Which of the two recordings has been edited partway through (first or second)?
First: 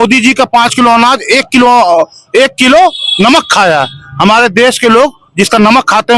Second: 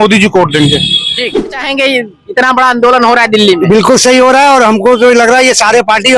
second